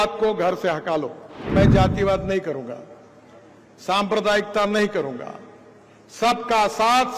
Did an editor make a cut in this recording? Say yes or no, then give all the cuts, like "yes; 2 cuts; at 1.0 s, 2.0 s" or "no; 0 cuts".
yes; 1 cut; at 1.4 s